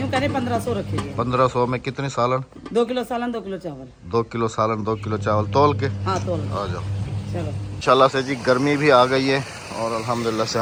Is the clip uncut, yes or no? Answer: yes